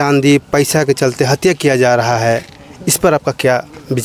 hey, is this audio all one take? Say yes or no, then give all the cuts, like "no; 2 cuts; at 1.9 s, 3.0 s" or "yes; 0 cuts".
yes; 0 cuts